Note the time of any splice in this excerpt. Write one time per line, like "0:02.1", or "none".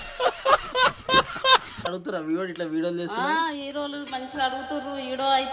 0:01.8